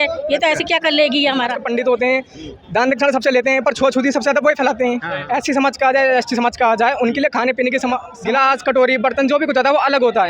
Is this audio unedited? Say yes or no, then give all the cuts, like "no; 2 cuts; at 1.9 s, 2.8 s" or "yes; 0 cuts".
no; 3 cuts; at 1.6 s, 5.1 s, 8.1 s